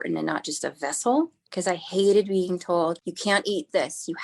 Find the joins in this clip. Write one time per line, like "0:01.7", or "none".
0:01.5
0:03.1